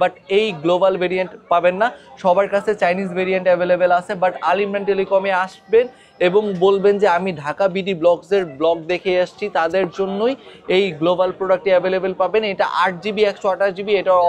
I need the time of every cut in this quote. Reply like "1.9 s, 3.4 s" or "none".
none